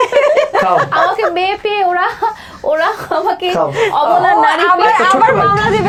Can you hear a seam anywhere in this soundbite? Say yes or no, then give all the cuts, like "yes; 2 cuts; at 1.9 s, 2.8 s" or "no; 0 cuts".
no; 0 cuts